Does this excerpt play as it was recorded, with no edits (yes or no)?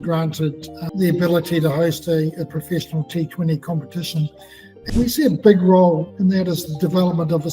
no